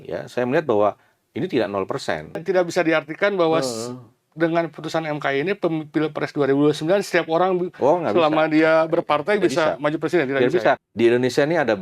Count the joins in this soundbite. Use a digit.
2